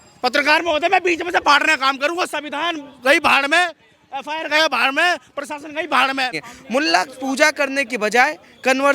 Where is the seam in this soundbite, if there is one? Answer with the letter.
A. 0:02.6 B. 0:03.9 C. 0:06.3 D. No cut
C